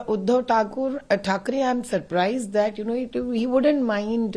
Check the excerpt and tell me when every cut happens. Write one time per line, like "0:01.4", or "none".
none